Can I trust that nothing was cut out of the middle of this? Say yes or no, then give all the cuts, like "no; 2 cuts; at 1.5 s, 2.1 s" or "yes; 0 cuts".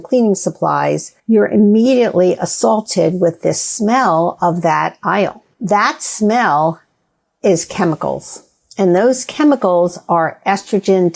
no; 2 cuts; at 1.1 s, 5.5 s